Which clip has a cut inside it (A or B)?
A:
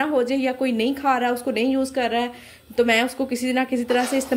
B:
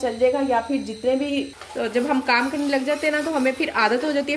B